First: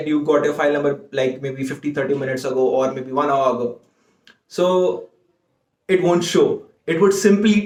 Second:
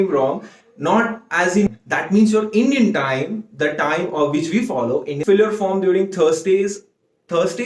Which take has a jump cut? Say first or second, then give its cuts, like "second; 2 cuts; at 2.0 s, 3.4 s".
second; 2 cuts; at 1.7 s, 5.2 s